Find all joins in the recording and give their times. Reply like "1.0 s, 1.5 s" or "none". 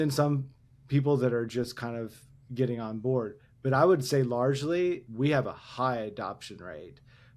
5.1 s